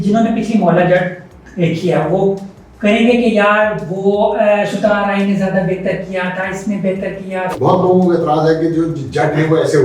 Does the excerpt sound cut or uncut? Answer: cut